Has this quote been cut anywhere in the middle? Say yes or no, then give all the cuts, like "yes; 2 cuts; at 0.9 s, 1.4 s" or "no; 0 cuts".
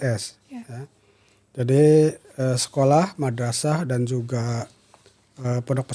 no; 0 cuts